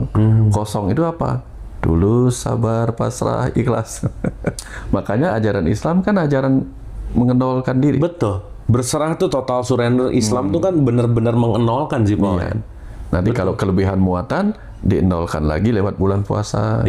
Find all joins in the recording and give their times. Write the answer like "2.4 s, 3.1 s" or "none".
none